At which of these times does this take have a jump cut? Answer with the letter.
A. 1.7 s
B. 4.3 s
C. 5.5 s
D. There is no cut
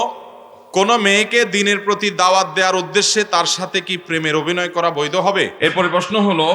C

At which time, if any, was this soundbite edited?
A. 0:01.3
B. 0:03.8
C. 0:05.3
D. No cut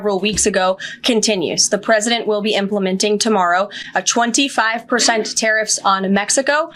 D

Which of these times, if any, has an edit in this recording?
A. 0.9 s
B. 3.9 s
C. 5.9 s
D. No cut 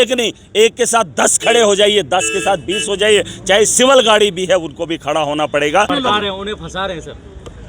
C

